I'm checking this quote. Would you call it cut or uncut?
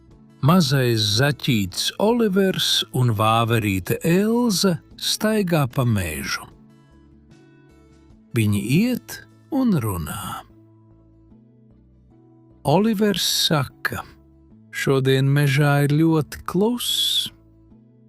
cut